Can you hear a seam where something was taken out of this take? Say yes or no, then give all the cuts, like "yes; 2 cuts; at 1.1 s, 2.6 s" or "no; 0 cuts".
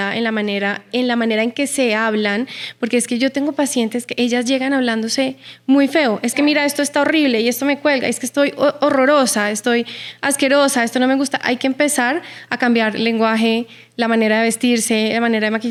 no; 0 cuts